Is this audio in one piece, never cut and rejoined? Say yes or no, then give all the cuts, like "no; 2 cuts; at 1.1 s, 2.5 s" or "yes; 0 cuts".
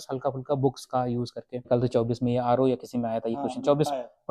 no; 1 cut; at 1.6 s